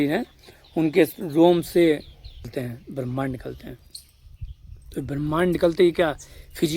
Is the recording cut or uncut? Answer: cut